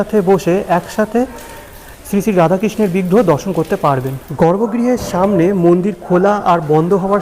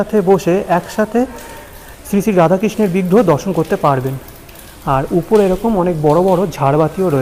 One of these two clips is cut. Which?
first; 1 cut; at 4.2 s

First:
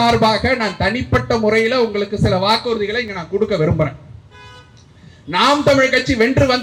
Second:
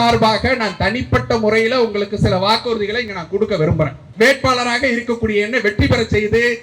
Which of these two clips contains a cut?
second; 1 cut; at 4.0 s

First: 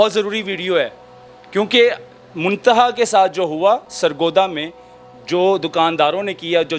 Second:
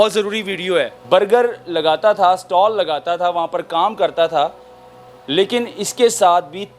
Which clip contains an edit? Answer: second; 1 cut; at 1.0 s

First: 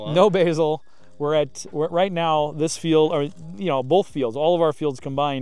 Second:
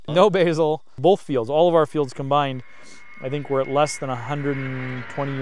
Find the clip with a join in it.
second; 1 cut; at 1.0 s

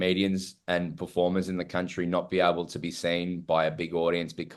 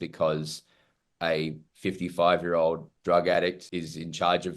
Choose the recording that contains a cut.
second; 1 cut; at 2.9 s

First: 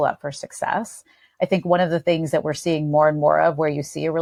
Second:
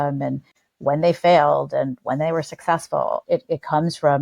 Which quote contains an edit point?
second; 1 cut; at 3.2 s

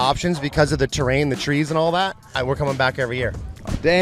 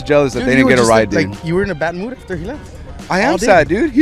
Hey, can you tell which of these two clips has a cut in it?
first; 1 cut; at 2.2 s

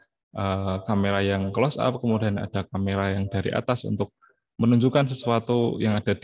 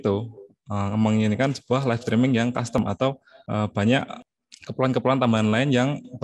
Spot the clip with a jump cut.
second; 2 cuts; at 2.8 s, 4.2 s

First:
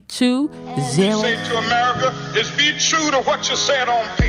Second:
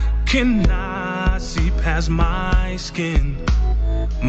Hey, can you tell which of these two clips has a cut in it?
first; 1 cut; at 1.3 s

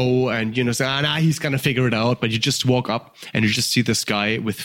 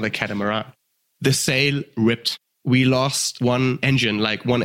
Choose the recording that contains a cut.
second; 3 cuts; at 0.9 s, 2.5 s, 3.5 s

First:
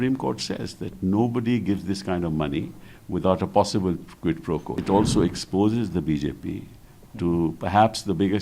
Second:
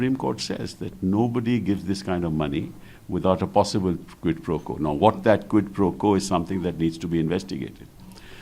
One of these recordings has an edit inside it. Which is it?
first; 1 cut; at 4.8 s

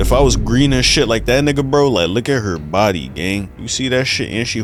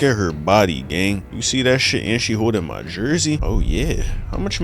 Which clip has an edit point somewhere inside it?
second; 1 cut; at 3.4 s

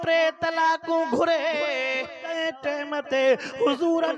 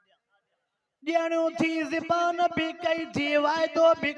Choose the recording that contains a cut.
first; 1 cut; at 2.3 s

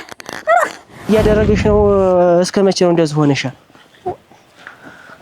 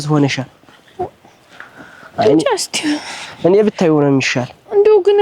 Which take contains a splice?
first; 1 cut; at 1.1 s

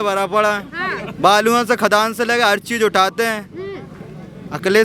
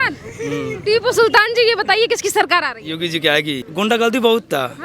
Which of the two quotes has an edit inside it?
second; 1 cut; at 3.6 s

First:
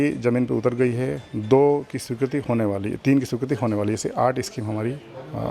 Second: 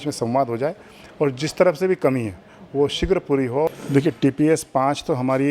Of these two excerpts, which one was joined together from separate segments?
second; 1 cut; at 3.7 s

